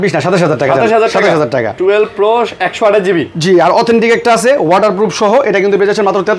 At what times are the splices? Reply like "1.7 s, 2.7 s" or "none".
none